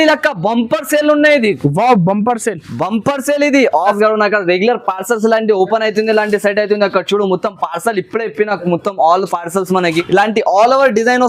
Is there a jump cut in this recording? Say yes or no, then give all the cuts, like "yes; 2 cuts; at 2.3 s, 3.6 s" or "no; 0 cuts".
yes; 2 cuts; at 4.0 s, 10.0 s